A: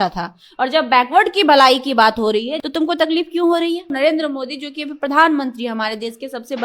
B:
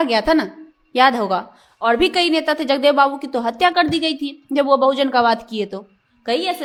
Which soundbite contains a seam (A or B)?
A